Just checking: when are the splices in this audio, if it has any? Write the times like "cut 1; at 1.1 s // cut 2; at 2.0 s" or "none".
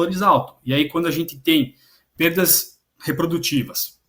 none